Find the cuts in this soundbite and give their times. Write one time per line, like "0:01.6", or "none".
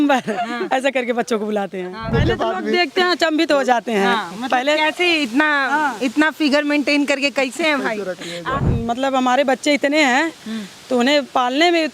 0:02.1
0:08.5